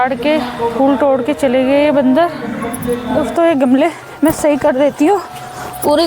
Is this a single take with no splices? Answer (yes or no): no